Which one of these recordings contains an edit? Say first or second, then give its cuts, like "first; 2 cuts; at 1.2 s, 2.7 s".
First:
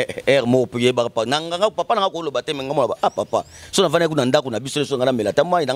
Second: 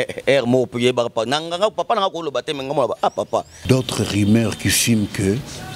second; 1 cut; at 3.5 s